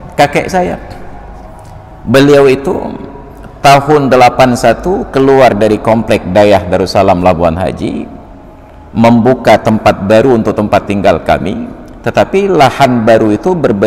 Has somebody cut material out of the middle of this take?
no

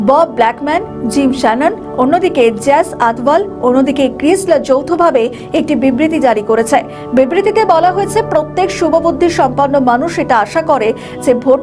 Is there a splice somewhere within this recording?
no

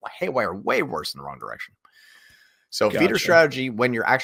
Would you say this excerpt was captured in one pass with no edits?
yes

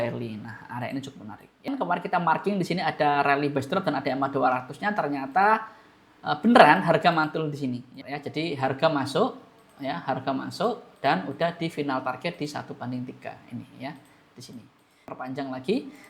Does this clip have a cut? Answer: yes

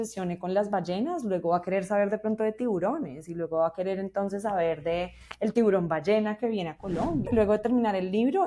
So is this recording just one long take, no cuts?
no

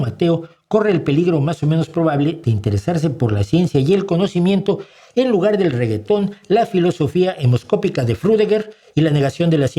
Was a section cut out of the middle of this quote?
no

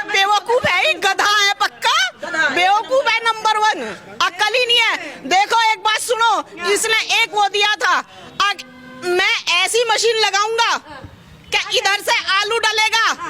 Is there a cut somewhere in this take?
no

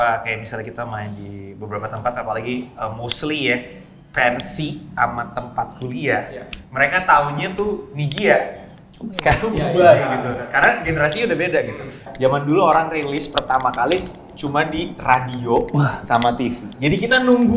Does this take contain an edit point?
yes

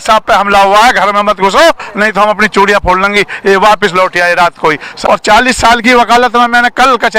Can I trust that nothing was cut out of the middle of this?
no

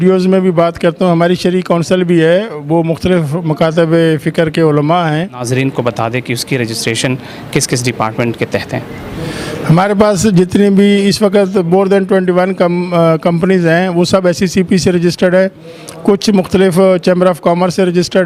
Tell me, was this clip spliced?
yes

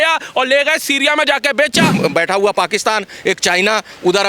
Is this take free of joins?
no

